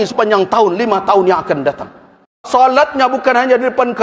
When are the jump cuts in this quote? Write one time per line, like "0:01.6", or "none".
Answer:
0:02.4